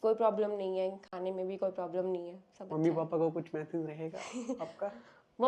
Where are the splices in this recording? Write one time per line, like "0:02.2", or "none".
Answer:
none

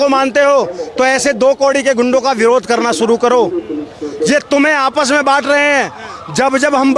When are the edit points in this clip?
none

